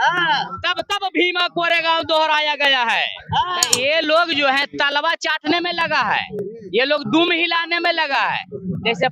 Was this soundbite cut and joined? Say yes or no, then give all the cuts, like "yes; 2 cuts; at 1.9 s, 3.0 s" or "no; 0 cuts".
yes; 1 cut; at 3.7 s